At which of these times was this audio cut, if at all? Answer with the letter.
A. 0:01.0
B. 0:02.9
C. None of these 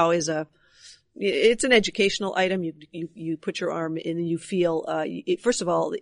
C